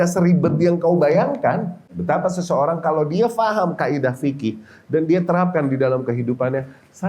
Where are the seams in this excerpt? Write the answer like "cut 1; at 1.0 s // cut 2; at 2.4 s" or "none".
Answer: cut 1; at 1.9 s